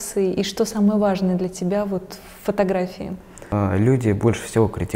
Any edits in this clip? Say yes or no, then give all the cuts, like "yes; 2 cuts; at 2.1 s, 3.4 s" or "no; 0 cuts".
yes; 1 cut; at 3.3 s